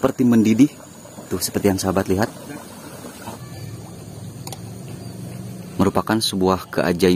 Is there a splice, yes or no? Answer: yes